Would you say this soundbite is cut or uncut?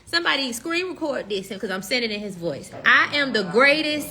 cut